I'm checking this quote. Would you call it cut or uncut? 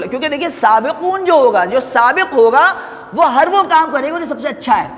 uncut